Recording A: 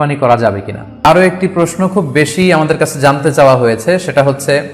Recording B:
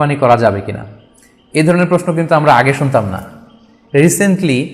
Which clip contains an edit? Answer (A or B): A